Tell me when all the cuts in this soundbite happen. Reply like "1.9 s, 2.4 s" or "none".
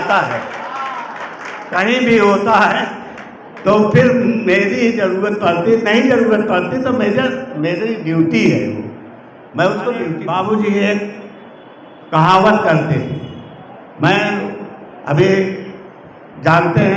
10.2 s